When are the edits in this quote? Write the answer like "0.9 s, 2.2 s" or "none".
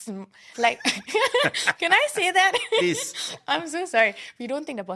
none